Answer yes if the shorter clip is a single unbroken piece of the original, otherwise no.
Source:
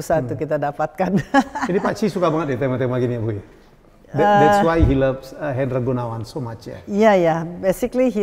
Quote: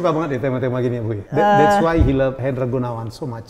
no